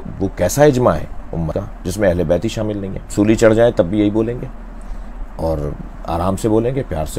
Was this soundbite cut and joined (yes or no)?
yes